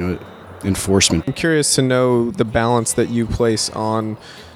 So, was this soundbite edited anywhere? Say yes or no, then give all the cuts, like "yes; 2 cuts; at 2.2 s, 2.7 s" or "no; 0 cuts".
yes; 1 cut; at 1.3 s